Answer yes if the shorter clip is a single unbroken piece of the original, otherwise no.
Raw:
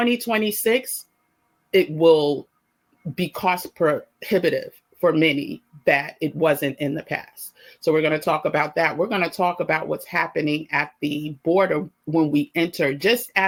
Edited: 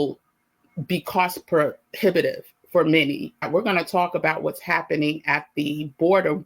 no